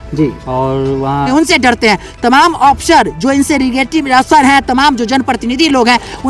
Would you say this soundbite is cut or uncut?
cut